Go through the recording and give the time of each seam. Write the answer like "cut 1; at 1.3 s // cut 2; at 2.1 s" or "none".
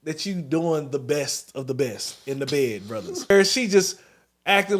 cut 1; at 3.3 s

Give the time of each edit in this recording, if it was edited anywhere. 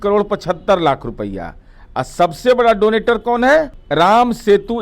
cut 1; at 3.8 s

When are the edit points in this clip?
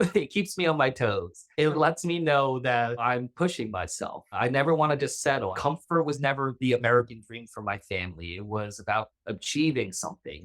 cut 1; at 1.7 s // cut 2; at 3.0 s // cut 3; at 4.4 s // cut 4; at 5.6 s

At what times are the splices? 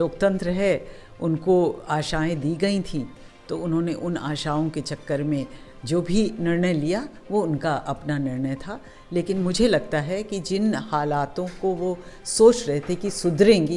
none

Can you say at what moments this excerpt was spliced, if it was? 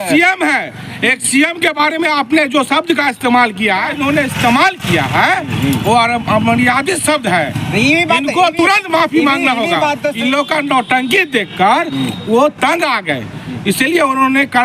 cut 1; at 3.9 s // cut 2; at 10.1 s

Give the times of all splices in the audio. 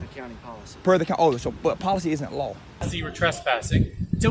cut 1; at 2.9 s

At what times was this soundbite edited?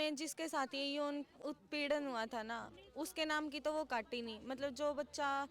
cut 1; at 1.4 s

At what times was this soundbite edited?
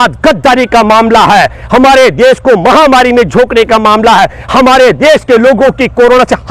none

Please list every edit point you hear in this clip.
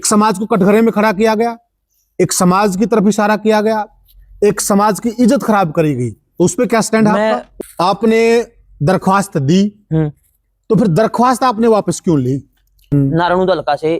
cut 1; at 7.5 s // cut 2; at 12.8 s

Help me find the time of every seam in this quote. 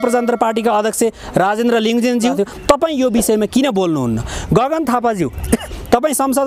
cut 1; at 2.3 s

